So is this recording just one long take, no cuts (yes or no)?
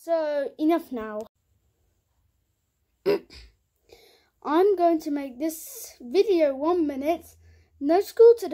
no